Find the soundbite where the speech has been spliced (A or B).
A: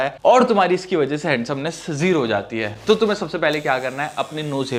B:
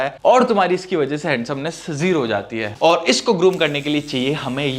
B